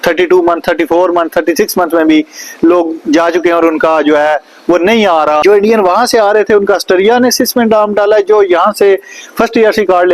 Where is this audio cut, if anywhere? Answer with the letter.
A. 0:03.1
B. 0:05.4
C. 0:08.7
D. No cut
B